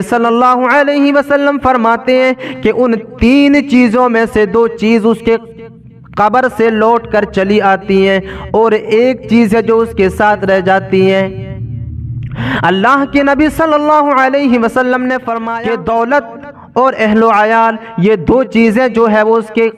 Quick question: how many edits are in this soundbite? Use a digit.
1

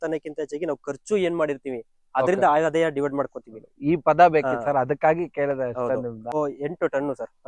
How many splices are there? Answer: 1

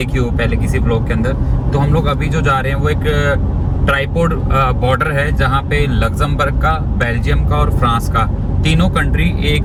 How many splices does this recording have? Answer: 0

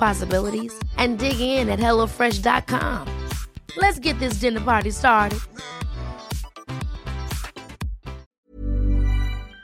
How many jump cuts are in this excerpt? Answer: 1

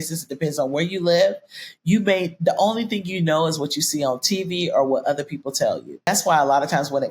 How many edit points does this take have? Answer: 1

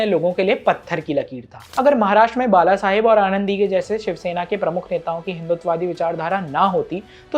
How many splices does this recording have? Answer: 1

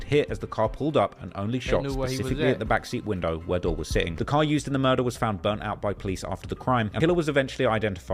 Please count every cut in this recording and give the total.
2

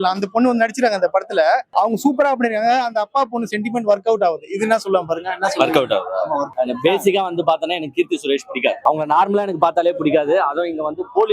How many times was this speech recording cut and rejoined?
3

